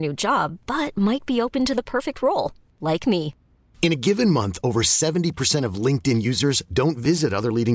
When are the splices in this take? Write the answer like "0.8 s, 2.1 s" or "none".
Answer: none